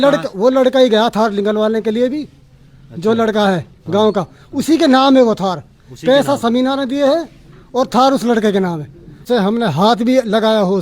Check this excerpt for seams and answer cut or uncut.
cut